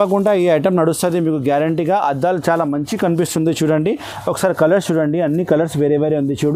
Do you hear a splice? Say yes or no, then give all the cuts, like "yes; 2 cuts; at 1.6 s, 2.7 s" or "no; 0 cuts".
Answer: no; 0 cuts